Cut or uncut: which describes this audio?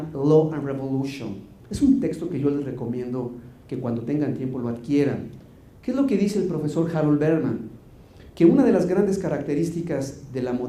cut